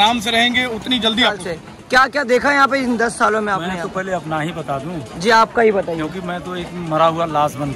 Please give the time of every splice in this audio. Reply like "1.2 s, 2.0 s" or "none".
1.4 s